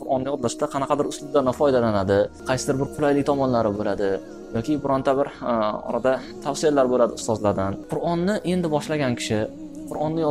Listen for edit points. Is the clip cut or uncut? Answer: cut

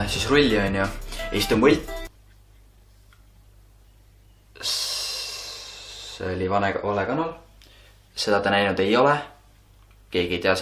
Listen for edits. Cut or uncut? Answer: uncut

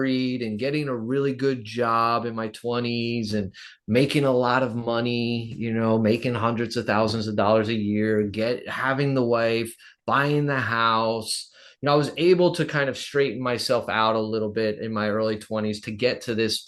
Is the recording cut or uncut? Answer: uncut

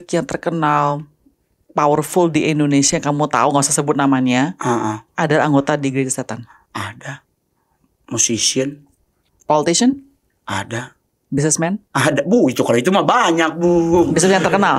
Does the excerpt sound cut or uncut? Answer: uncut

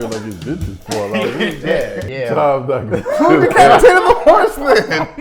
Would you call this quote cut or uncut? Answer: cut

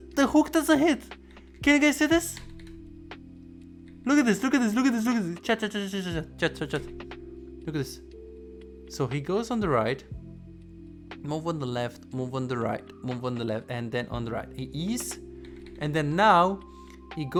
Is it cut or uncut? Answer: uncut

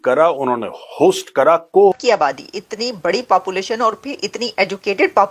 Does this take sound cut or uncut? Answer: cut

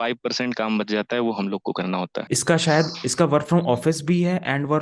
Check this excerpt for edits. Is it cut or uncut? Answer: cut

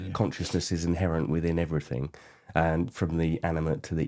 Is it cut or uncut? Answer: uncut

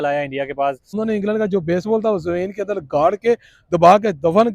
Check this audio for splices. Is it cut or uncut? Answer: cut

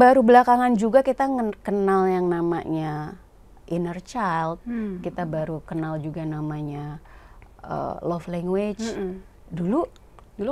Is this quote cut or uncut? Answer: uncut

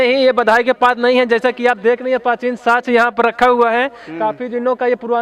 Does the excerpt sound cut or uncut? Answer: uncut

